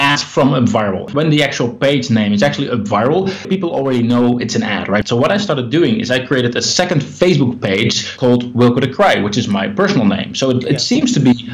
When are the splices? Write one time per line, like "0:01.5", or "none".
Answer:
0:01.1
0:03.5
0:05.0
0:08.1